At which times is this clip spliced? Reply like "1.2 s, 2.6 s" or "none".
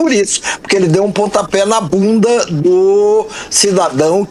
none